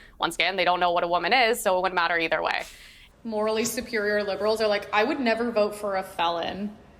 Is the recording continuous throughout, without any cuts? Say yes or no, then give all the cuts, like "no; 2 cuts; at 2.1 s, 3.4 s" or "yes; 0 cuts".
no; 1 cut; at 3.0 s